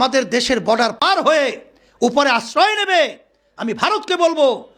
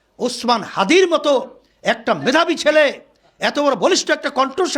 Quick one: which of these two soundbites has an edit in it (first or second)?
first